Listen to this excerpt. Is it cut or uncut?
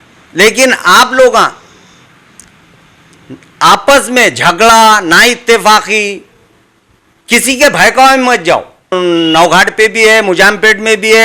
cut